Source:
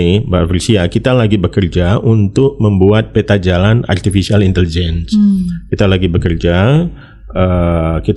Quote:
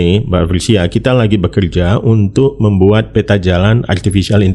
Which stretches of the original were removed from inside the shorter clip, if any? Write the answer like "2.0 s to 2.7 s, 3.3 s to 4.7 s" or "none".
none